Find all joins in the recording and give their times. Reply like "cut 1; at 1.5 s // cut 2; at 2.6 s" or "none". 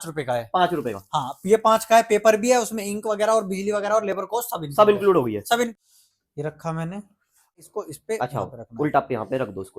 cut 1; at 5.7 s // cut 2; at 7.6 s